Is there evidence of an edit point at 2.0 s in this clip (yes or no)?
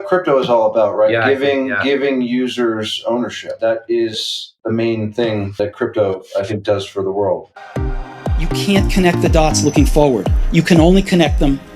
no